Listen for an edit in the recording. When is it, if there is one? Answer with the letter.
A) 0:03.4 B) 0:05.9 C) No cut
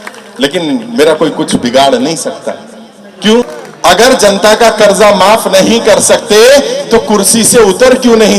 A